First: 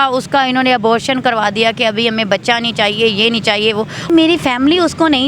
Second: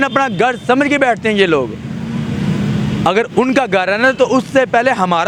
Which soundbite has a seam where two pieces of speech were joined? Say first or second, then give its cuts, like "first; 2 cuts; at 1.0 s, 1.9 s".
first; 1 cut; at 4.1 s